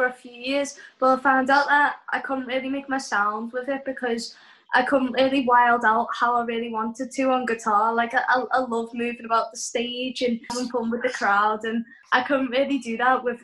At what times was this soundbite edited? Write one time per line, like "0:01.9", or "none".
0:10.5
0:12.0